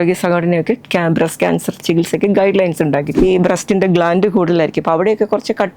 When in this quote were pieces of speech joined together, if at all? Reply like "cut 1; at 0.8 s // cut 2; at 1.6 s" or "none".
cut 1; at 3.1 s

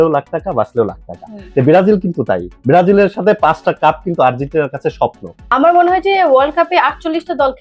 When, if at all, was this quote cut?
cut 1; at 5.4 s

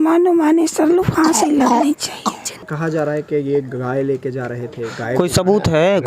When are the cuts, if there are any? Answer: cut 1; at 2.7 s

